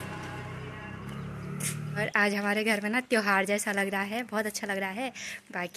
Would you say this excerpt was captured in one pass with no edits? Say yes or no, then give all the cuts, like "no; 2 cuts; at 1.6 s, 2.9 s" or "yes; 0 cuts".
no; 1 cut; at 2.0 s